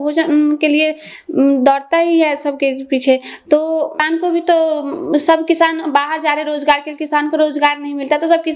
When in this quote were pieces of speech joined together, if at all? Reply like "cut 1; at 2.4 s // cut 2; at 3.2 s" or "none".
none